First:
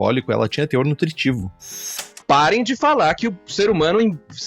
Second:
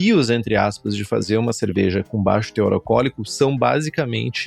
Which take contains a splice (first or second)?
first